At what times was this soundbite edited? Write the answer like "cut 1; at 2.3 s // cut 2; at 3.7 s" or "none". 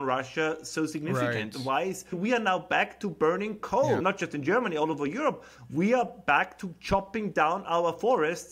cut 1; at 2.2 s // cut 2; at 4.0 s

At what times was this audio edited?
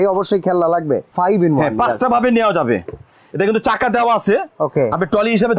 cut 1; at 1.1 s

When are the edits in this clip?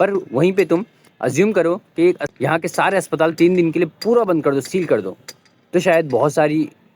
cut 1; at 2.3 s

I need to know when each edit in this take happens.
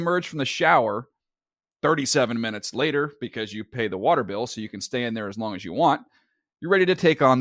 none

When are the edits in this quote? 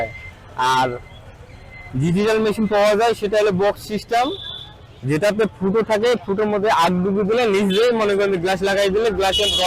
none

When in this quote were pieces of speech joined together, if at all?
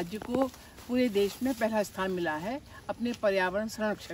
none

